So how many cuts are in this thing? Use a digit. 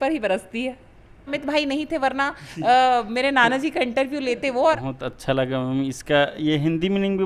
2